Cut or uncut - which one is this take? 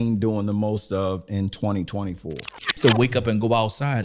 cut